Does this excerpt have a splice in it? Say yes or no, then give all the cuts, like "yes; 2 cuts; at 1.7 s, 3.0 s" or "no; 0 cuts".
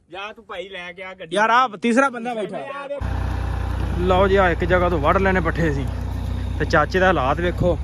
yes; 1 cut; at 3.1 s